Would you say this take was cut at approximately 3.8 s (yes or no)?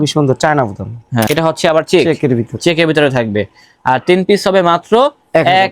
no